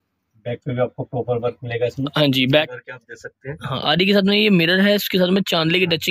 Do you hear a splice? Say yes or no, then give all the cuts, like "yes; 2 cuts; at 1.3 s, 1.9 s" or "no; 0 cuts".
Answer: yes; 1 cut; at 2.7 s